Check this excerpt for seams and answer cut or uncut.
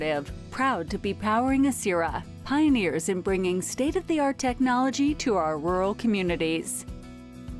cut